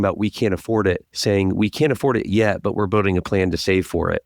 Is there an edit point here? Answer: yes; 1 cut; at 1.1 s

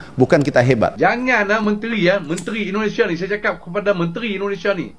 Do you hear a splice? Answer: yes; 1 cut; at 0.9 s

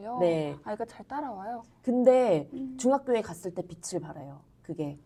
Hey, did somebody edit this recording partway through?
no; 0 cuts

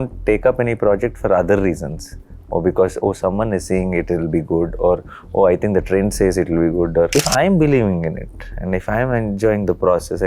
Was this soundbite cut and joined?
yes; 1 cut; at 7.1 s

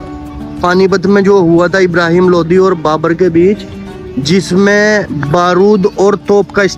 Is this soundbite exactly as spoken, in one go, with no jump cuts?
yes; 0 cuts

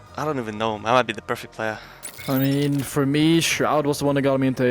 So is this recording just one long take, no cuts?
no; 1 cut; at 1.8 s

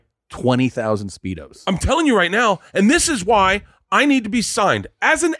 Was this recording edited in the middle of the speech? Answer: no; 0 cuts

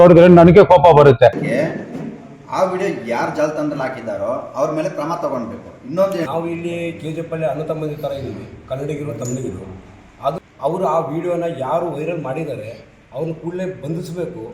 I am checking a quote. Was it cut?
yes; 3 cuts; at 1.4 s, 6.3 s, 10.4 s

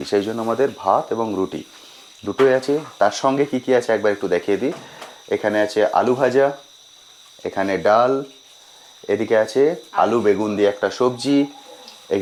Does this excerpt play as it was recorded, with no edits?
yes; 0 cuts

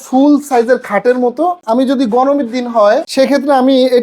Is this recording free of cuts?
no; 2 cuts; at 1.6 s, 3.1 s

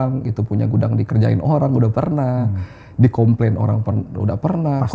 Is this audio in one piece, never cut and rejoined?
yes; 0 cuts

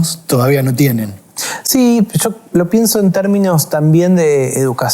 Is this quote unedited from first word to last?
yes; 0 cuts

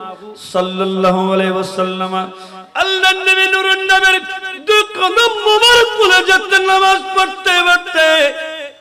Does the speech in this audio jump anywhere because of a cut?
no; 0 cuts

